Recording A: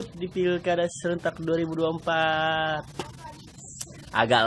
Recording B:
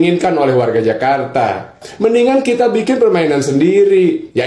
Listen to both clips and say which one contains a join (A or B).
B